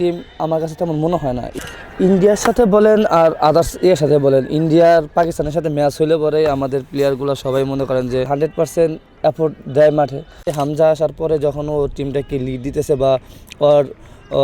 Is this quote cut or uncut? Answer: cut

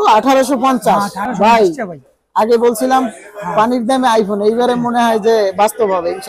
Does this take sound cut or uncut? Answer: cut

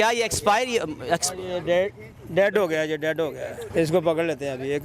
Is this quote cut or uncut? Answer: cut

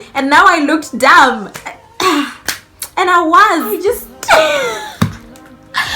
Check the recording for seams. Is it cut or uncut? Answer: cut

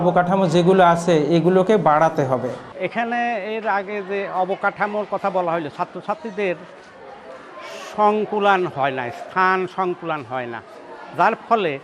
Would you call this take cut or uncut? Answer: cut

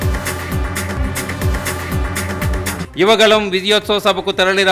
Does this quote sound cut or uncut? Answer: cut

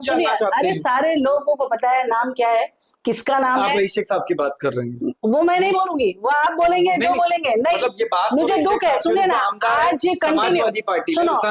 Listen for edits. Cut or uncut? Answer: uncut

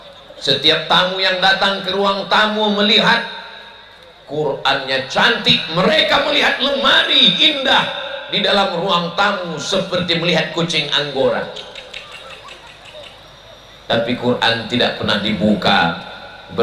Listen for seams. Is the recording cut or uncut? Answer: uncut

